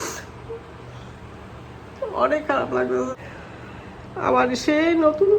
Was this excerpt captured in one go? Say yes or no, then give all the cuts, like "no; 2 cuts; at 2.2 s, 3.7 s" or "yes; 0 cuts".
no; 1 cut; at 3.2 s